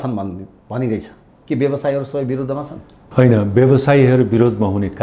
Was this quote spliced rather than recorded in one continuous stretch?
no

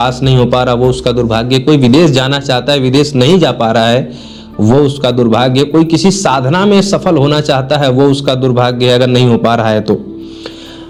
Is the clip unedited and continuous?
yes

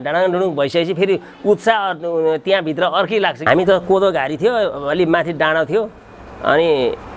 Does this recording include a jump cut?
yes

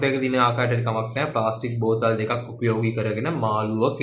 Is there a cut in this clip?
no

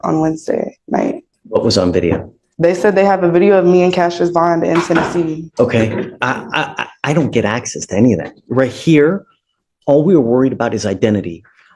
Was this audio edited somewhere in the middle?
yes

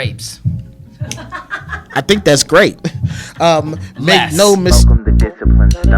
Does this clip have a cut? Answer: yes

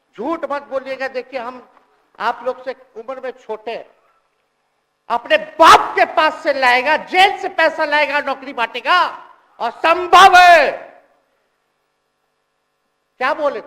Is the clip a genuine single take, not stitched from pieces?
yes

